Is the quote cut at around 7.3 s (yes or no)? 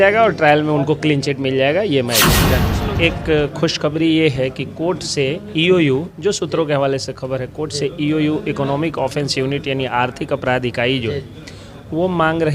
no